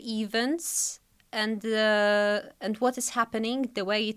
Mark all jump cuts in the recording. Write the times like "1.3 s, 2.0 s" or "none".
none